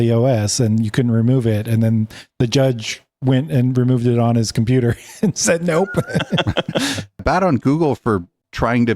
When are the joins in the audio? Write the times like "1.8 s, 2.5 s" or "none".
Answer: 7.2 s